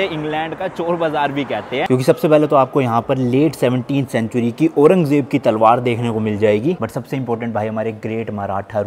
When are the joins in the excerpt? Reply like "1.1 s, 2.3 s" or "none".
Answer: 1.9 s, 6.8 s